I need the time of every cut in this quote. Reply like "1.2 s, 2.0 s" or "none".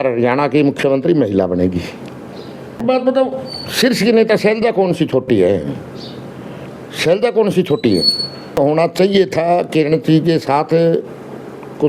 2.8 s, 8.6 s